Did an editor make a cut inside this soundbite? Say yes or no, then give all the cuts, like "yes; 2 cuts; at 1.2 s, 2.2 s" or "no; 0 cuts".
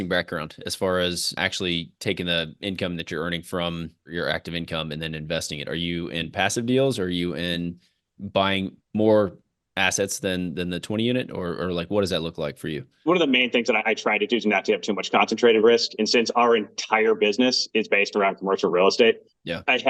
yes; 3 cuts; at 1.4 s, 4.0 s, 13.0 s